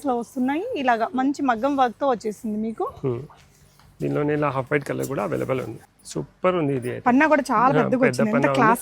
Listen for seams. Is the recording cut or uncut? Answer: uncut